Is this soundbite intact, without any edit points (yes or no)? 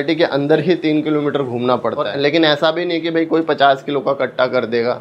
no